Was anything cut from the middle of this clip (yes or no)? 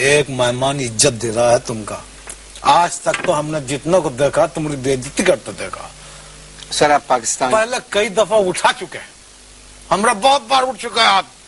yes